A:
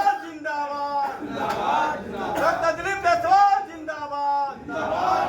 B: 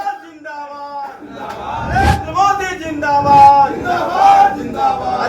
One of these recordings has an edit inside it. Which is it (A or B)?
B